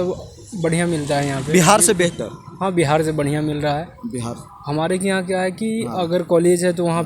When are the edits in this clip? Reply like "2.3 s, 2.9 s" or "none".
none